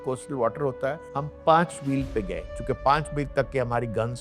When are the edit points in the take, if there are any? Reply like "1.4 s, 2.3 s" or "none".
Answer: none